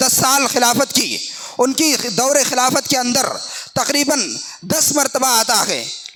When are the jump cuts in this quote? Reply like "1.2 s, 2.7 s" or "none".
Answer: none